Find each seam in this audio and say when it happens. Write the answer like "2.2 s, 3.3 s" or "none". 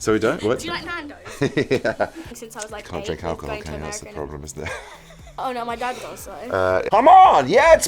2.3 s, 6.9 s